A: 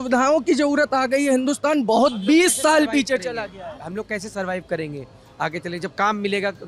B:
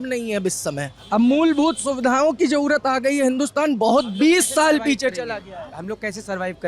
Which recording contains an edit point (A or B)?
B